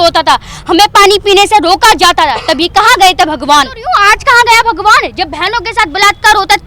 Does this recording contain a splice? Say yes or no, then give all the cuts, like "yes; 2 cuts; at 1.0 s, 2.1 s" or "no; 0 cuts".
yes; 1 cut; at 4.0 s